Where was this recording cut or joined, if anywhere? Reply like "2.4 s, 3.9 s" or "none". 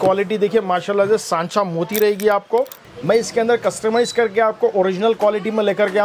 2.8 s